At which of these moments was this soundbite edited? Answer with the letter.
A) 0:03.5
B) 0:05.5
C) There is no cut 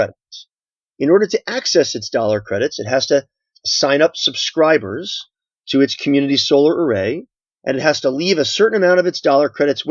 A